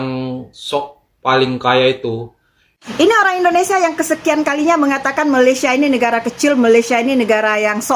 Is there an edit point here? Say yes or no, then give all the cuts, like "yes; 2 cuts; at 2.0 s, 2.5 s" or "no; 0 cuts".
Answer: no; 0 cuts